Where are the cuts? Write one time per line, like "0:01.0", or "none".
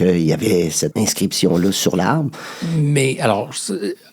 0:00.9